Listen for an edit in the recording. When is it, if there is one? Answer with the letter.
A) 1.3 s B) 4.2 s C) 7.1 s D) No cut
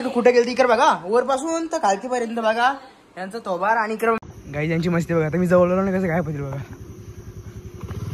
B